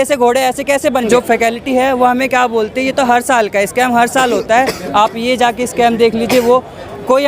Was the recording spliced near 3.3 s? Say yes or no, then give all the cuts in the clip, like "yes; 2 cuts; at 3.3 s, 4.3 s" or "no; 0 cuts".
no; 1 cut; at 1.1 s